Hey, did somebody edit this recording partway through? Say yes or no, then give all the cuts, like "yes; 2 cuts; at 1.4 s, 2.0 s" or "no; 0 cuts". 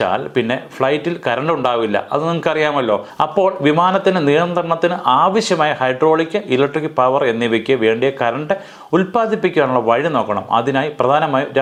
no; 0 cuts